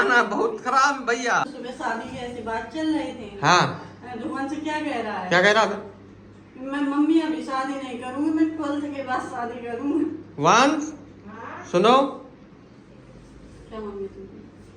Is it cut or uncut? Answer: cut